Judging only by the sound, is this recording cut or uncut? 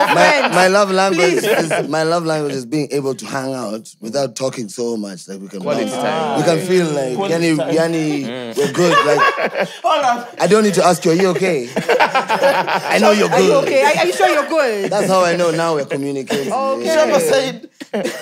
uncut